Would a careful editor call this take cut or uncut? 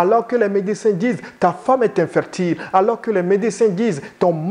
uncut